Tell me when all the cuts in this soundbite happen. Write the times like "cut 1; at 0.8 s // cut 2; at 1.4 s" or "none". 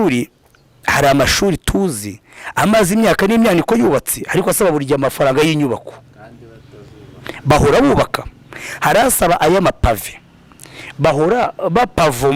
none